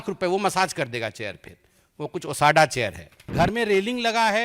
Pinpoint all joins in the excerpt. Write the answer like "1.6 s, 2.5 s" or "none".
3.3 s